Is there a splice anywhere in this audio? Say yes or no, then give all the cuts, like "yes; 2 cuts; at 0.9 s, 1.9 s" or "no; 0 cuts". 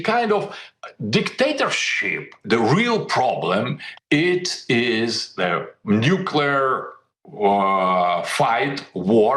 yes; 1 cut; at 2.4 s